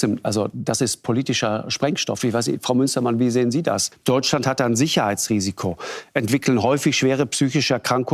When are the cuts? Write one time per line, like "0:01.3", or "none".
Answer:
0:03.9